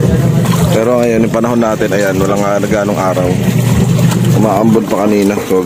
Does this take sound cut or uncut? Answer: uncut